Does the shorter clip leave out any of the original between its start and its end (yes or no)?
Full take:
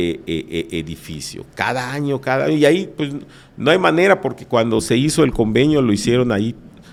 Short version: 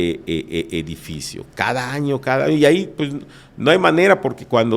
no